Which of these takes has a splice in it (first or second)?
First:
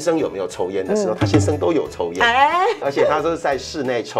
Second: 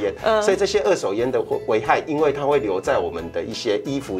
first